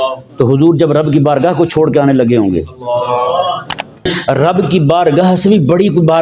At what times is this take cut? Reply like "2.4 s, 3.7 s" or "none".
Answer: 4.1 s